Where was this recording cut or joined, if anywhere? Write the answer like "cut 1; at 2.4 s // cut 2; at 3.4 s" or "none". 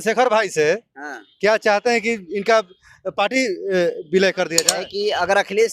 cut 1; at 4.6 s